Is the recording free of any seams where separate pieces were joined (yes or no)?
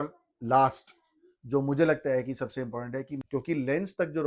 no